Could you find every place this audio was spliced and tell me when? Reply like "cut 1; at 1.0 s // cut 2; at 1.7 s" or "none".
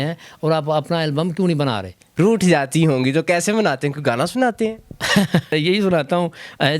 cut 1; at 2.0 s // cut 2; at 5.5 s